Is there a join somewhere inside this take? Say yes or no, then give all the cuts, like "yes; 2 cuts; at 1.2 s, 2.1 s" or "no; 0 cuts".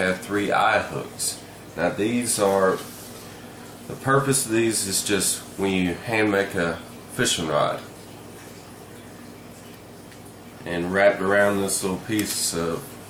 no; 0 cuts